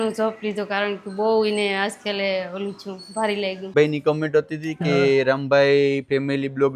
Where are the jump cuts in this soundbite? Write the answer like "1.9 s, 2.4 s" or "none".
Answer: 3.7 s